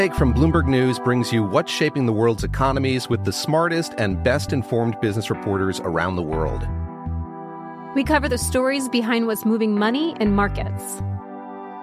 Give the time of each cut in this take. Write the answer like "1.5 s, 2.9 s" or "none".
none